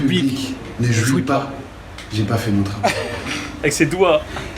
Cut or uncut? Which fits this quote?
uncut